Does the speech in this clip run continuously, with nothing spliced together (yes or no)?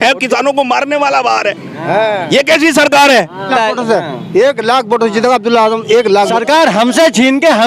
no